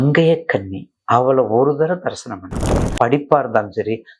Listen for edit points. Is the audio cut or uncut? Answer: cut